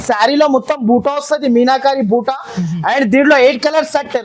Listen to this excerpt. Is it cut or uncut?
uncut